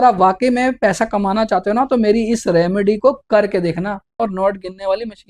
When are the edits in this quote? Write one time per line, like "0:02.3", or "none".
0:04.2